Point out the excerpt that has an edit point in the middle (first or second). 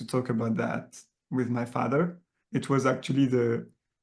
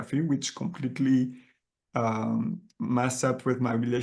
first